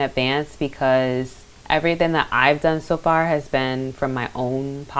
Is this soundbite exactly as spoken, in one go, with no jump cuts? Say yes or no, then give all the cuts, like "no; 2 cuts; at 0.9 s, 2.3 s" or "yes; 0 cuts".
yes; 0 cuts